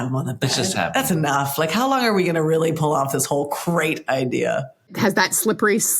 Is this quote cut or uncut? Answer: cut